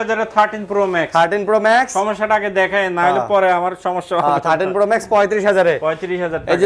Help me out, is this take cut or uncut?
uncut